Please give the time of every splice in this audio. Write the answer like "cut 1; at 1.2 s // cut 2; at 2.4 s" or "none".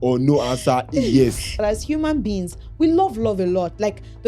cut 1; at 1.6 s

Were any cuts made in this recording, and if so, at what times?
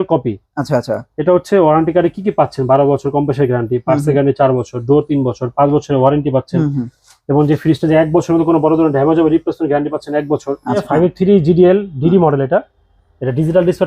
cut 1; at 10.8 s

